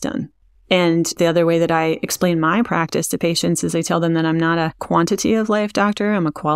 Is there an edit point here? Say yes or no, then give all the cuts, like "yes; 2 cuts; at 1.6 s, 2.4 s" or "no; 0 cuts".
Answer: no; 0 cuts